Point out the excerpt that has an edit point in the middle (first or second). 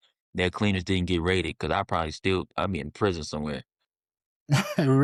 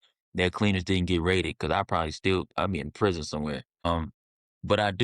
second